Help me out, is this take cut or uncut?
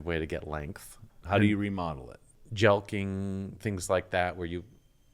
cut